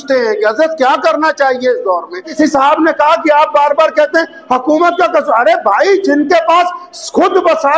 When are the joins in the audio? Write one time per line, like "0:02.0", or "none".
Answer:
0:02.3